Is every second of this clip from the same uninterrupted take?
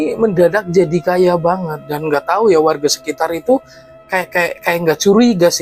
yes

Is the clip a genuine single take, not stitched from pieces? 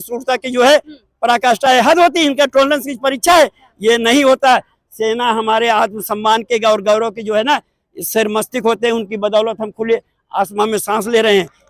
yes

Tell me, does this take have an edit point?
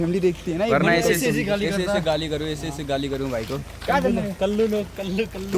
no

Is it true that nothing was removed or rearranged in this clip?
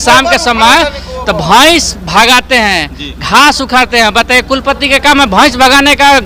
yes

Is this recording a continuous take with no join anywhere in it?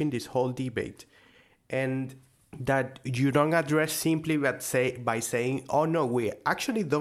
yes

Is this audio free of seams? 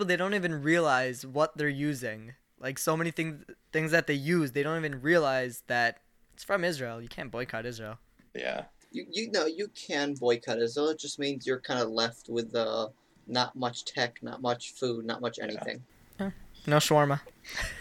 yes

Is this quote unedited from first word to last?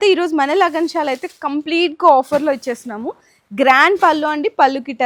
yes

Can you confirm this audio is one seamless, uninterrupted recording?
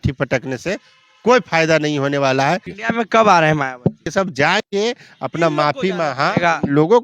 no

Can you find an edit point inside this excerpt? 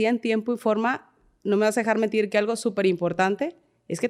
no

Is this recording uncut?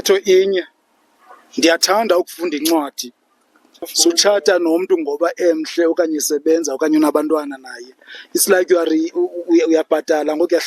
no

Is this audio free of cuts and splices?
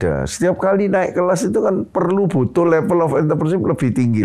yes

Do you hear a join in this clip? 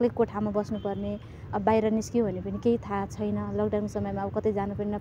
no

